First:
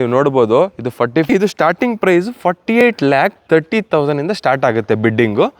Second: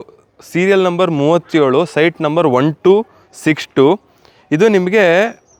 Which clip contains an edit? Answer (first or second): first